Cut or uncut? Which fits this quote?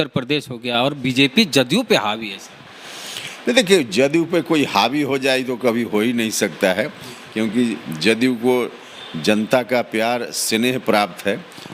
uncut